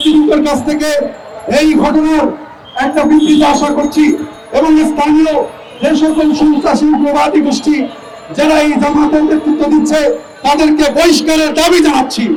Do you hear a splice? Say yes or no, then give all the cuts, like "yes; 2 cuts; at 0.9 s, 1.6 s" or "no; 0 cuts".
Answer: no; 0 cuts